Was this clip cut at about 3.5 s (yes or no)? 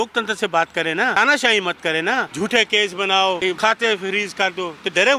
yes